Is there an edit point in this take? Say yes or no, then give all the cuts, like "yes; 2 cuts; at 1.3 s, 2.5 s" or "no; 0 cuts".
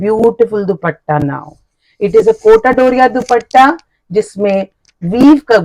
no; 0 cuts